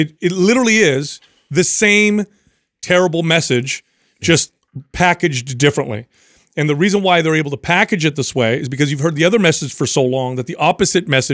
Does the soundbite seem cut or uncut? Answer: uncut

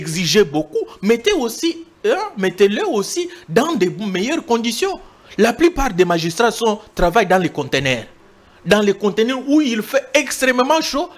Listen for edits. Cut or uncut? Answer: uncut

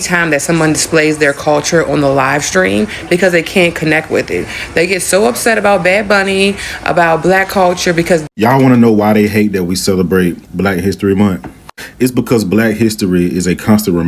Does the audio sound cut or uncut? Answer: cut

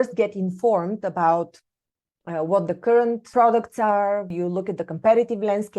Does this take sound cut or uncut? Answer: cut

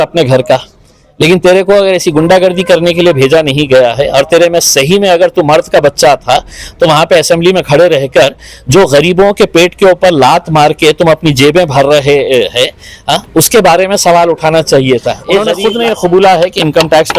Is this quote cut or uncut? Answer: cut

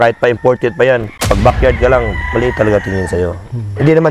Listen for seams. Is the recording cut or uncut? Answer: cut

